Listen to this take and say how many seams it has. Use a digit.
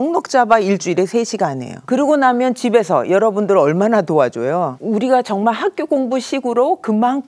2